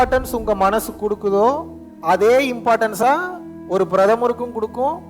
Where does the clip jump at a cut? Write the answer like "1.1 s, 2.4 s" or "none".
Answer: 3.0 s